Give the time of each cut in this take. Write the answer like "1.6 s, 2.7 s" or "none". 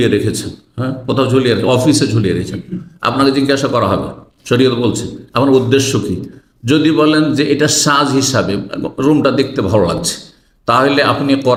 none